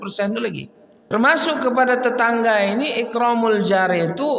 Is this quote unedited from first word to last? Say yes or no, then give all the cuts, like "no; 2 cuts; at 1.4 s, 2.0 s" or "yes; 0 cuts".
no; 1 cut; at 1.1 s